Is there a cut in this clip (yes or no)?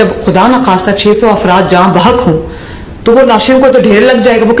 no